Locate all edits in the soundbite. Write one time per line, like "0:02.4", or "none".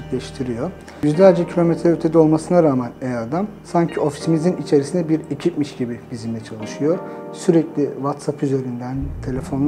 0:01.0